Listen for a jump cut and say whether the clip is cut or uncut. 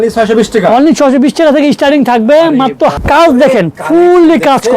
cut